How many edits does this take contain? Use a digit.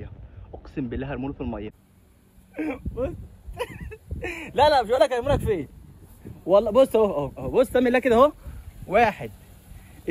1